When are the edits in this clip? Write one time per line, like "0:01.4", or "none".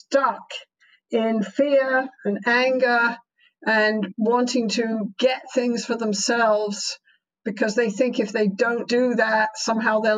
0:04.1
0:05.1
0:08.8